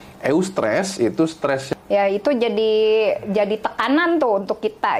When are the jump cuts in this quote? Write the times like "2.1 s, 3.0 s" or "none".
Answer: 1.7 s